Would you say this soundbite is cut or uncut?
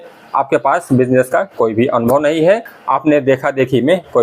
cut